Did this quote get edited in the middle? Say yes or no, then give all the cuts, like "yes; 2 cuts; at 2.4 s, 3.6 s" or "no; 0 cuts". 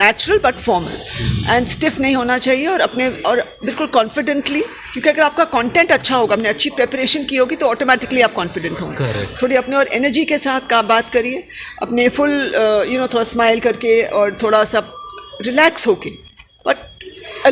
no; 0 cuts